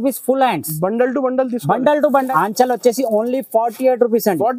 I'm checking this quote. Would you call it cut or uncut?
cut